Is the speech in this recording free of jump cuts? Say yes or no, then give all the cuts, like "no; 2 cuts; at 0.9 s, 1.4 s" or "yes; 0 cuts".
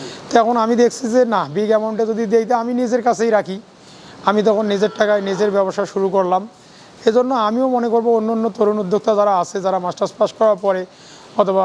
yes; 0 cuts